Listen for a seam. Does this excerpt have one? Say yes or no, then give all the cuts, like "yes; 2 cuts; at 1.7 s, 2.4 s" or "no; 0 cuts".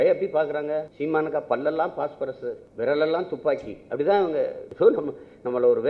yes; 3 cuts; at 0.9 s, 2.6 s, 4.6 s